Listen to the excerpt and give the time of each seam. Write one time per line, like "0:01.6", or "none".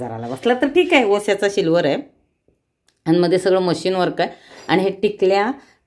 0:01.2